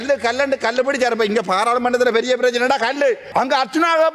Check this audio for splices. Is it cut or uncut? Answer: cut